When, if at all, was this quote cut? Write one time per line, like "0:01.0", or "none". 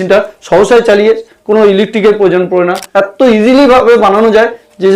0:02.8